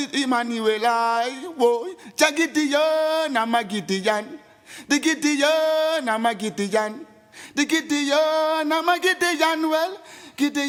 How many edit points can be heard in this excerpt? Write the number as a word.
zero